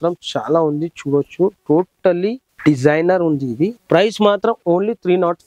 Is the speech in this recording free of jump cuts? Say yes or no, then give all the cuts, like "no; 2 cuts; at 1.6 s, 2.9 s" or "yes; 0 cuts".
no; 2 cuts; at 2.5 s, 3.8 s